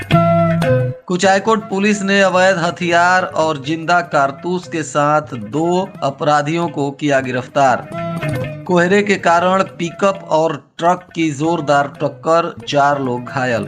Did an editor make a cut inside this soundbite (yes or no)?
yes